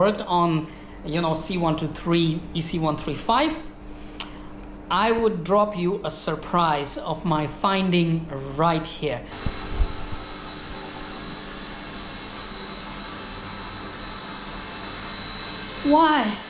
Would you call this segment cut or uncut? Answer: cut